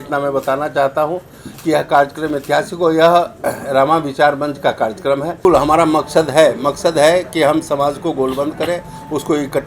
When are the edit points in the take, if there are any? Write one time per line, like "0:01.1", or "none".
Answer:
0:05.4